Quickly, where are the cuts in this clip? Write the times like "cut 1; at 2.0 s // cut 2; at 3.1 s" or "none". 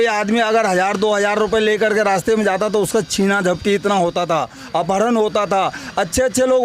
none